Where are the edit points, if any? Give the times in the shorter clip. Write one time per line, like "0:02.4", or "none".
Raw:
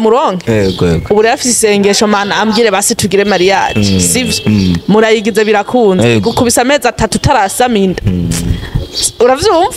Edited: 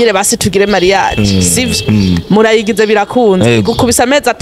none